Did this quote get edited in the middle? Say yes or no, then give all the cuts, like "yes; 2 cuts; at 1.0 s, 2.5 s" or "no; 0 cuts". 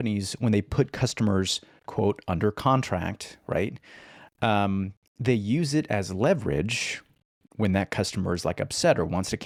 no; 0 cuts